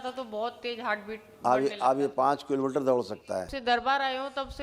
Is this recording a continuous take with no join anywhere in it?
no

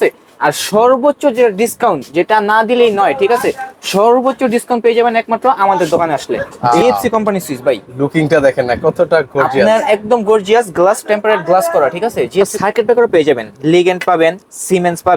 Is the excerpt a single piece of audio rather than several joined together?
no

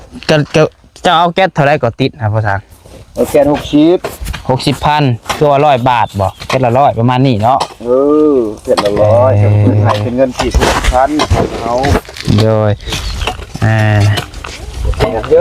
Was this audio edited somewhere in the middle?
no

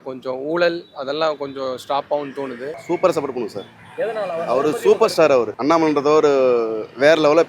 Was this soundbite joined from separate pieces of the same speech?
yes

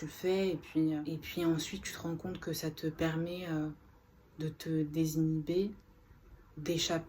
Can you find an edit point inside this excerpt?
yes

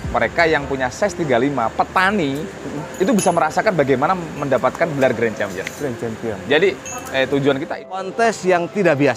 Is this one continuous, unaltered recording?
no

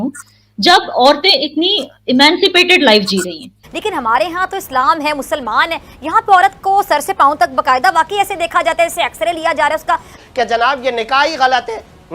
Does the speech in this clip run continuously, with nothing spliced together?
no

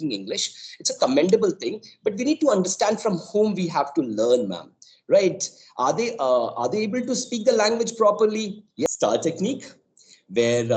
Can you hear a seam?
yes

